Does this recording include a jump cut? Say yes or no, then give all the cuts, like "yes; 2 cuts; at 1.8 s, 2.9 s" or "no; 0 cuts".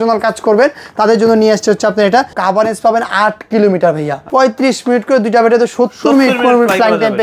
yes; 2 cuts; at 2.4 s, 4.1 s